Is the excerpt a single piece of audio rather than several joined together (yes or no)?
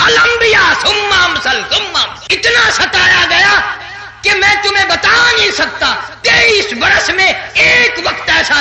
no